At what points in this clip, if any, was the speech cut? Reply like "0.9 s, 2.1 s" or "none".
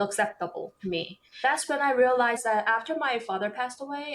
1.4 s, 2.4 s